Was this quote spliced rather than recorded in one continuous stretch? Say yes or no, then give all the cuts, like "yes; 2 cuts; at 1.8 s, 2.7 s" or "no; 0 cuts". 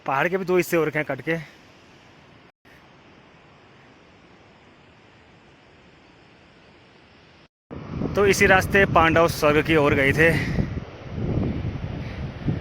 yes; 1 cut; at 7.5 s